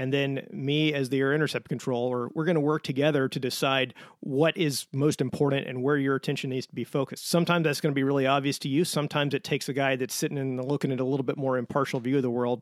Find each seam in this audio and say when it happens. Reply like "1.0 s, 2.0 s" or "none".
none